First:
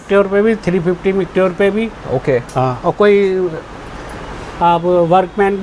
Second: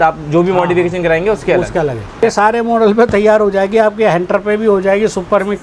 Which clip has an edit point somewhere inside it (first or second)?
second